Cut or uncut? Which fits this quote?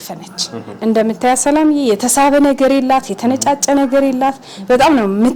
uncut